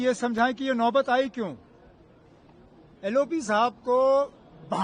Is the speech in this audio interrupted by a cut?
no; 0 cuts

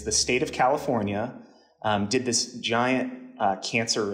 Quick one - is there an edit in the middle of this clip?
no; 0 cuts

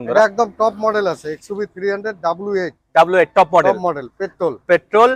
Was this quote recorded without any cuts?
yes; 0 cuts

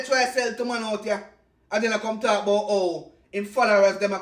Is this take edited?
no; 0 cuts

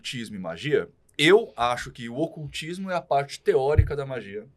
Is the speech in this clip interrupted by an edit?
no; 0 cuts

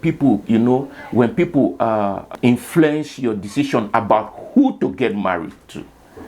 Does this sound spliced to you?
yes; 1 cut; at 2.3 s

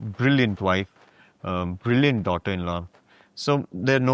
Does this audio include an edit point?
no; 0 cuts

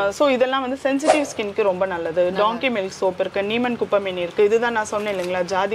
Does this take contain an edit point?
no; 0 cuts

